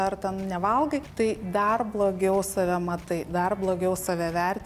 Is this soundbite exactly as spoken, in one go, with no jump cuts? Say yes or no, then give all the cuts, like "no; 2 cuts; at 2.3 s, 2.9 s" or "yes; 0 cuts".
no; 1 cut; at 1.1 s